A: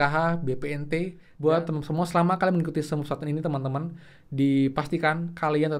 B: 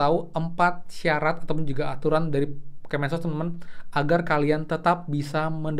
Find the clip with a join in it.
A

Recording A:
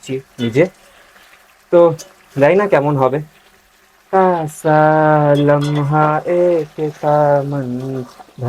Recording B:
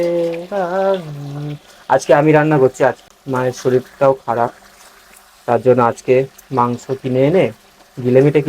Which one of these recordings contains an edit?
B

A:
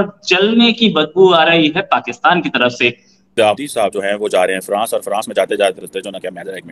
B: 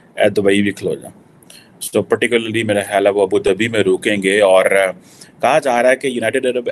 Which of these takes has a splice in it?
A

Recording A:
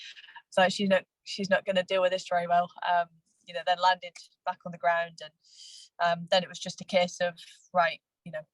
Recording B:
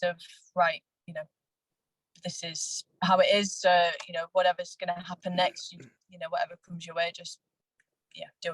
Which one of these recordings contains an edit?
B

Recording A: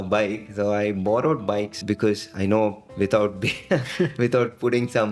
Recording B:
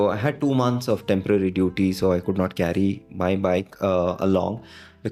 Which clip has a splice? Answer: A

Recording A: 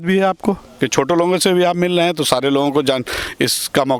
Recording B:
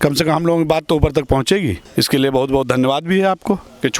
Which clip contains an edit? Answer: B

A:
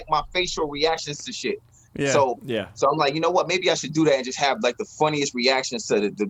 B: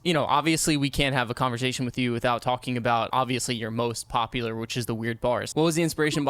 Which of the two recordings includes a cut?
B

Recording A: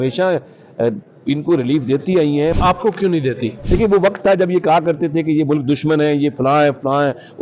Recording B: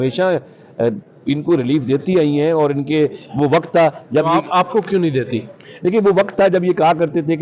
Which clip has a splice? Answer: A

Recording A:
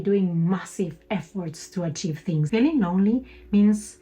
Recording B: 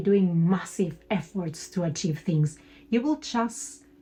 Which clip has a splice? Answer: A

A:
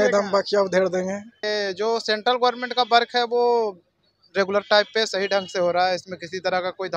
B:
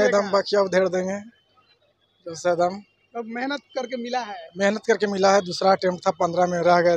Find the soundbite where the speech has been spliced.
A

